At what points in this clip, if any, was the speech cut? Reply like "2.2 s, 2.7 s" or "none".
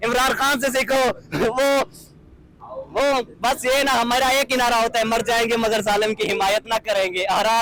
none